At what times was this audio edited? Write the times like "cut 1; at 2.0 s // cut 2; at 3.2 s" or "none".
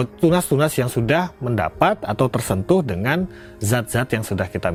none